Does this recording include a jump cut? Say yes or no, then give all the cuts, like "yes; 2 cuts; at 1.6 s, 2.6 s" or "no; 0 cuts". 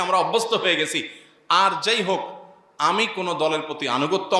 no; 0 cuts